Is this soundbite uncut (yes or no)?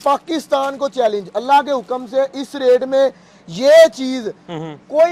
yes